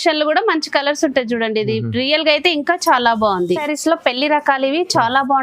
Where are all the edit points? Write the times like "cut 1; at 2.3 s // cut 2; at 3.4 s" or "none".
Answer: cut 1; at 3.7 s